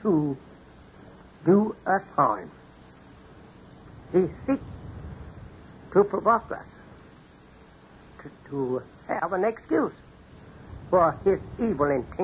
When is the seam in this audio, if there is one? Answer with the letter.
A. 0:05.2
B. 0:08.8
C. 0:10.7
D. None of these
D